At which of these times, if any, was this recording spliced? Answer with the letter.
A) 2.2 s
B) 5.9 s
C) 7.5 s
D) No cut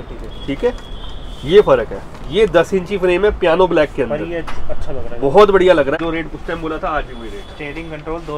B